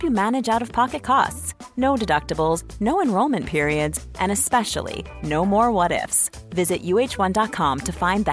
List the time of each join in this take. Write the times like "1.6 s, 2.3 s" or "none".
none